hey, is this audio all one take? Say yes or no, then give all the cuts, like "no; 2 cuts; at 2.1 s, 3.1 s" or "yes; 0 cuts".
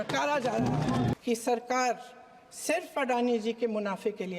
no; 1 cut; at 1.1 s